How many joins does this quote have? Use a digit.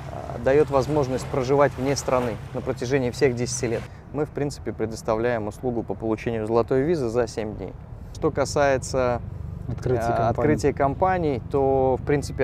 2